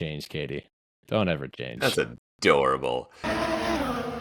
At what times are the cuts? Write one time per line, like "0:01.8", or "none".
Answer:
0:03.2